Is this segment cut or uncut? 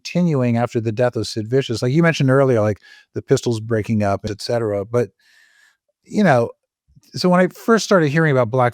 cut